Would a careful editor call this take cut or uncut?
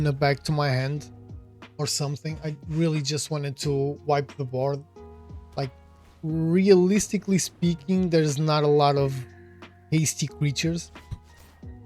cut